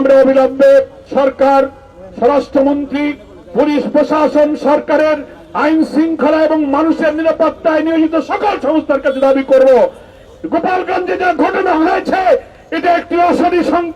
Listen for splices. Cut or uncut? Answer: cut